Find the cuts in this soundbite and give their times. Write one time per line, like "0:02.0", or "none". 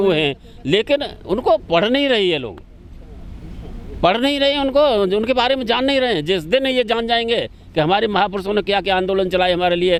none